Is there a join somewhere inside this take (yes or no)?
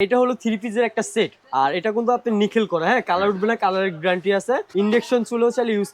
yes